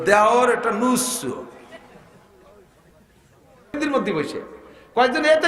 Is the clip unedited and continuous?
no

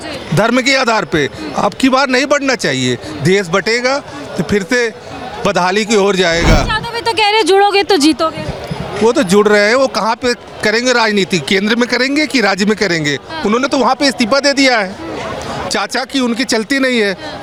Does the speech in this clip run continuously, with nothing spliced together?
yes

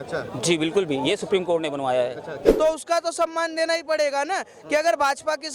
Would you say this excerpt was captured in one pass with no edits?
no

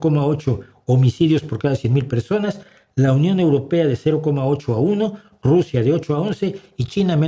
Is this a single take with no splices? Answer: yes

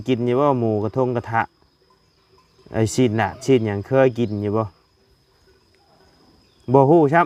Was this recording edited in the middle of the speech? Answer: no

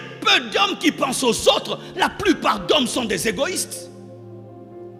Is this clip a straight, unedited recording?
yes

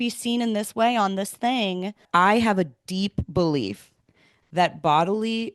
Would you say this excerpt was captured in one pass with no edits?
no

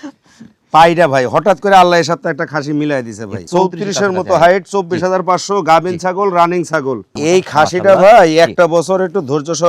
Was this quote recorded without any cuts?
no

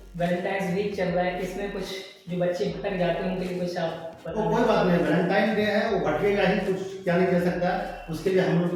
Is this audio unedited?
yes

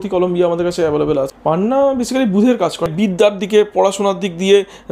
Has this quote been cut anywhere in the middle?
yes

